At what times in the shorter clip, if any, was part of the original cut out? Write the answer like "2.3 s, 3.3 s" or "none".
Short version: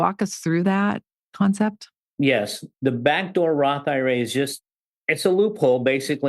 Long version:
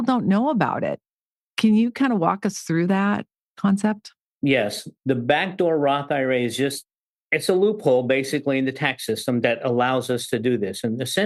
none